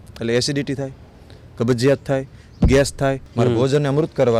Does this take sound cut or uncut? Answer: cut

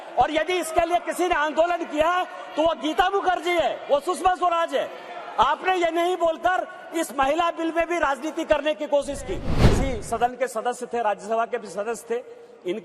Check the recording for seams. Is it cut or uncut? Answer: cut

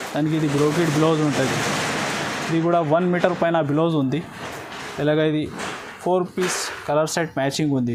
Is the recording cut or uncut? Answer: uncut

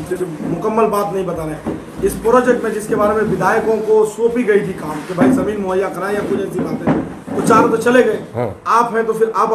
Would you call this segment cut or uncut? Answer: uncut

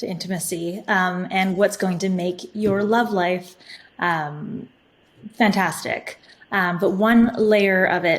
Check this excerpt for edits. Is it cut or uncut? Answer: uncut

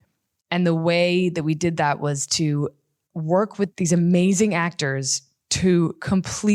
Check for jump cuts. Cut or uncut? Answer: cut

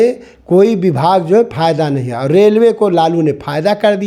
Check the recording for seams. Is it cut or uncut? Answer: uncut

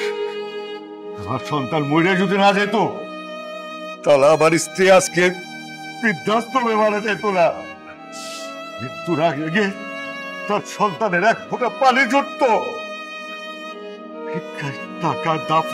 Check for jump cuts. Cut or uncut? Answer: cut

